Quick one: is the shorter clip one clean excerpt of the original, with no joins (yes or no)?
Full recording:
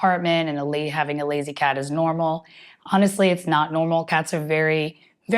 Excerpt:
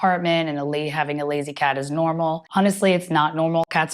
no